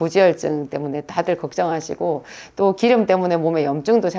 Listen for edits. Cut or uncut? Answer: uncut